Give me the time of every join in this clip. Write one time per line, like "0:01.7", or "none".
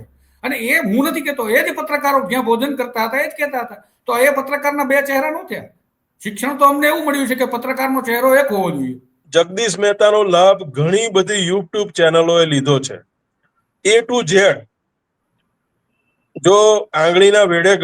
0:09.2

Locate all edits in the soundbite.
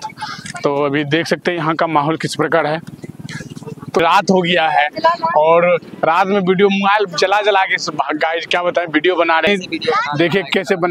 0:04.0
0:09.5

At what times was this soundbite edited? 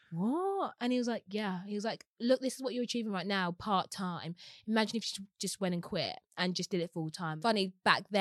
0:07.3

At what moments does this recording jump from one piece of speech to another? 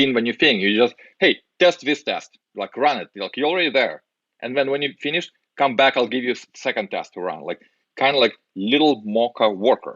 none

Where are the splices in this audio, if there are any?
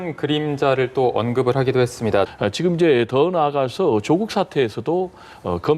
0:02.3

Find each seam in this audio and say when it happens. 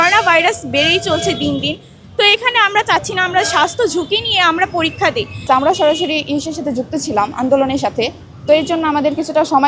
0:05.5

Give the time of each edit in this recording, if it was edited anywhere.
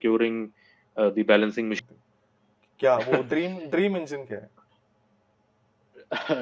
0:01.8

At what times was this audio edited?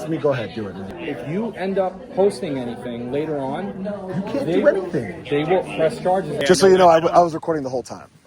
0:00.9
0:06.3

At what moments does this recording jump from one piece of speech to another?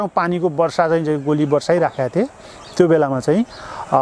none

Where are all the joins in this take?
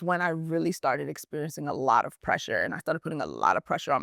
none

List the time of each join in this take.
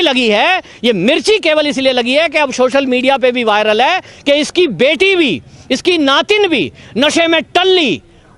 none

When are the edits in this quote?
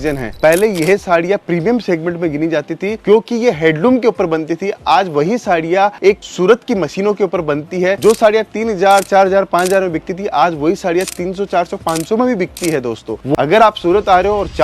0:13.4

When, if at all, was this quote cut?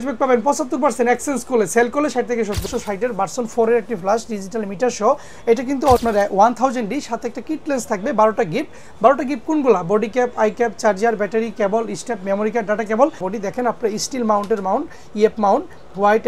0:02.8
0:06.0
0:13.3

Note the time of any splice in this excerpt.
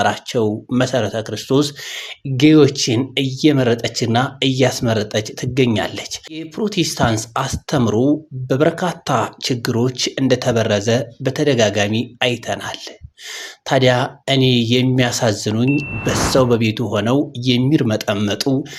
0:06.4

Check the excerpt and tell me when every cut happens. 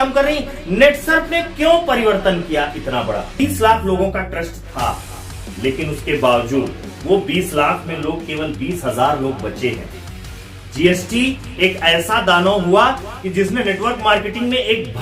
0:03.4

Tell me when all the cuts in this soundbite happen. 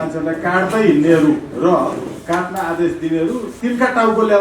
0:01.5
0:03.5

